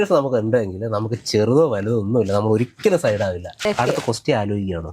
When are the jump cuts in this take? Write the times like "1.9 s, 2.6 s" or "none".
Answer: 3.7 s